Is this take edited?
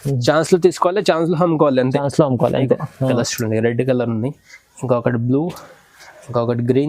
yes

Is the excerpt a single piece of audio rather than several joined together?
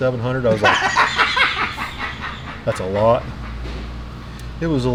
yes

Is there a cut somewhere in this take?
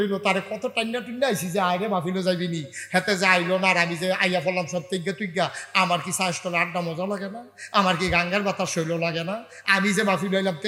no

